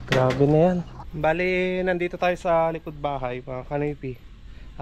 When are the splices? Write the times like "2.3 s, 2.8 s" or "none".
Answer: 1.0 s